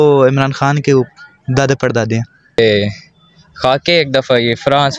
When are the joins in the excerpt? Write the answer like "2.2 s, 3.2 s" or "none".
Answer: 2.6 s